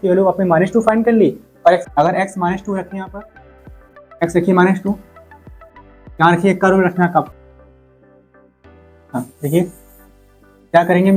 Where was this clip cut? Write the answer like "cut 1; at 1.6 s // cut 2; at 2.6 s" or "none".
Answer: cut 1; at 1.8 s // cut 2; at 7.3 s